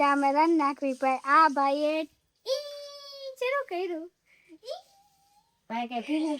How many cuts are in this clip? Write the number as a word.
zero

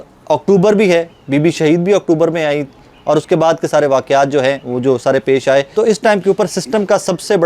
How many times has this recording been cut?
one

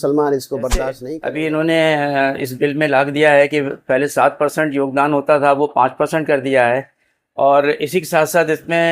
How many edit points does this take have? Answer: one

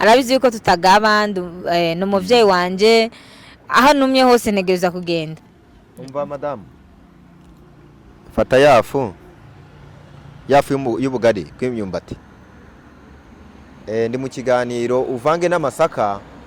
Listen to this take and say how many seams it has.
one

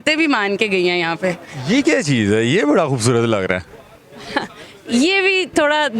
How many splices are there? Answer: zero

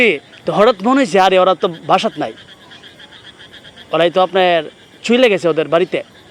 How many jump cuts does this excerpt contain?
zero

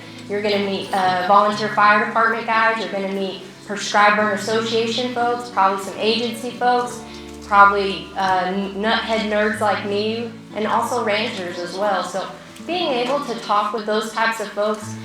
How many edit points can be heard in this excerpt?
two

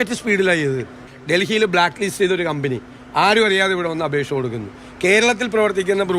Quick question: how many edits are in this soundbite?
one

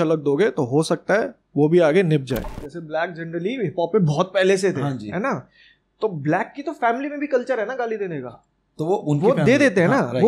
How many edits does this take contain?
one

